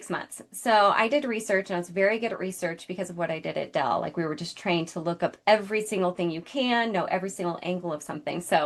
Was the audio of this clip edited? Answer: no; 0 cuts

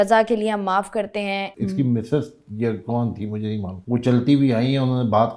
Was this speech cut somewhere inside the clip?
yes; 2 cuts; at 1.5 s, 3.8 s

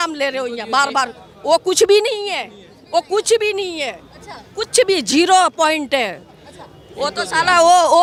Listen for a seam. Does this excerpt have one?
no; 0 cuts

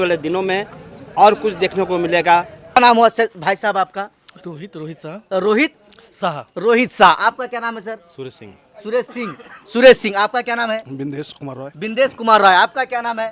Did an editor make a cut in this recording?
yes; 1 cut; at 2.8 s

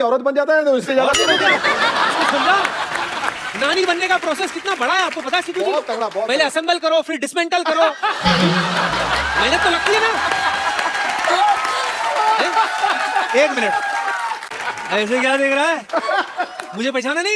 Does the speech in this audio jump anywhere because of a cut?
yes; 1 cut; at 14.5 s

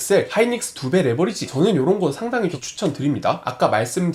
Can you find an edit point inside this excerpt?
no; 0 cuts

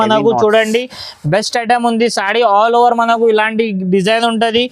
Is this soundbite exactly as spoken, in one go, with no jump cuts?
yes; 0 cuts

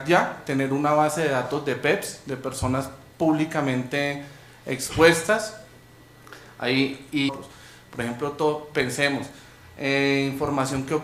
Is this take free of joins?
yes; 0 cuts

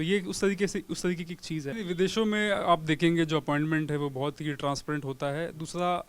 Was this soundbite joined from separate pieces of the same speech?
yes; 1 cut; at 1.6 s

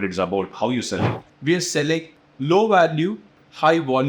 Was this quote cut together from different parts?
yes; 1 cut; at 1.2 s

